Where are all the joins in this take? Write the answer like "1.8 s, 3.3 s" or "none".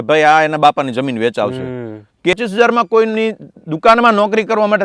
2.3 s